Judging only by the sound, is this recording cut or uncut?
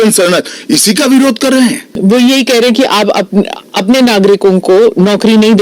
cut